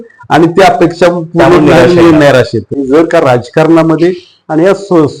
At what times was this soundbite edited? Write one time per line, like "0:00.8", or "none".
0:02.7